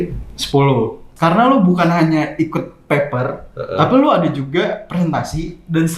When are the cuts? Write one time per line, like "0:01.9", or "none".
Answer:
0:01.0